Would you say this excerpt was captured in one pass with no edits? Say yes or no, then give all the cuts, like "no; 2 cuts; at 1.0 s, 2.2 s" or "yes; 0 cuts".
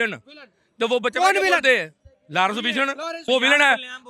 no; 1 cut; at 3.2 s